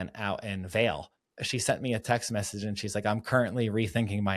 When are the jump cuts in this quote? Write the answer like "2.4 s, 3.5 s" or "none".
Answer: 1.3 s